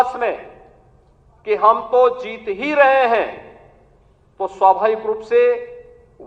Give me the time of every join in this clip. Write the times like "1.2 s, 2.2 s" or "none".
none